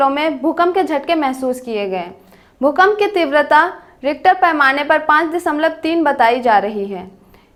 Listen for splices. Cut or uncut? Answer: uncut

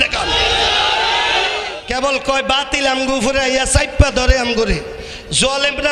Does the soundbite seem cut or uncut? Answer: cut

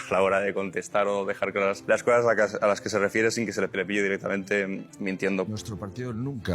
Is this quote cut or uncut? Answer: cut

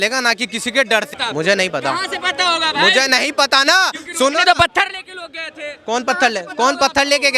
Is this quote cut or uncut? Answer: cut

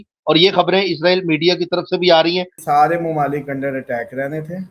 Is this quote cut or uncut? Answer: cut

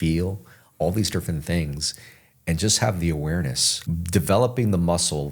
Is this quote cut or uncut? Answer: cut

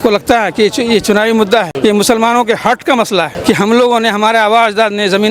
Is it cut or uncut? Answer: cut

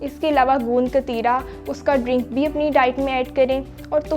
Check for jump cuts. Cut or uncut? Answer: uncut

